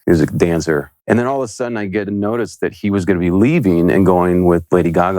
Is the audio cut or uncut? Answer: cut